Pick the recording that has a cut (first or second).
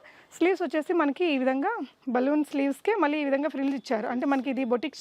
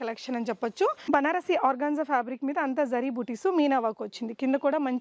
second